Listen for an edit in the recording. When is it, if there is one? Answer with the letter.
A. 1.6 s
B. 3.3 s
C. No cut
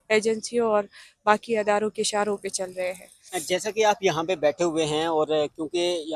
C